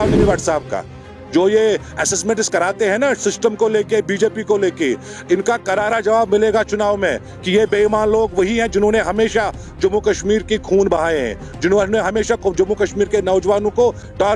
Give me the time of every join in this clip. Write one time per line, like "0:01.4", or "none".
none